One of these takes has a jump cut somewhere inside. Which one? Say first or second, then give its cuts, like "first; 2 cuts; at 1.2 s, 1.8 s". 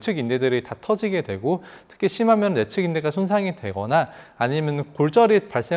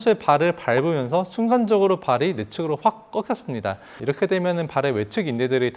second; 1 cut; at 4.0 s